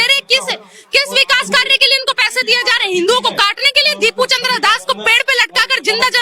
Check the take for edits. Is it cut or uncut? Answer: uncut